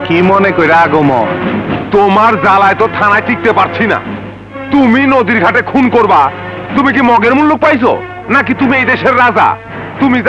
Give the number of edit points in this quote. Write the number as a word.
zero